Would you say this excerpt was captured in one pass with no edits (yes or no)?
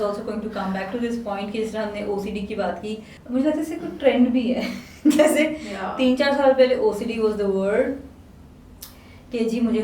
no